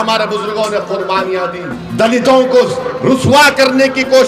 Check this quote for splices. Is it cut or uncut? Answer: cut